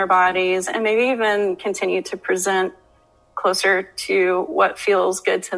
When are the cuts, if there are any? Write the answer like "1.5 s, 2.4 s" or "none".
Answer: 3.3 s